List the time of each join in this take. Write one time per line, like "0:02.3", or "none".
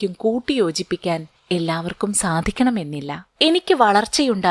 0:01.3
0:03.2